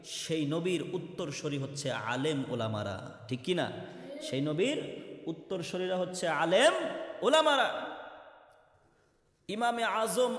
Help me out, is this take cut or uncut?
uncut